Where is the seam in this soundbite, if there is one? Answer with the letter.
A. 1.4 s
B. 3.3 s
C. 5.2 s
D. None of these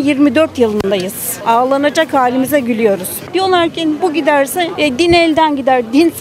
B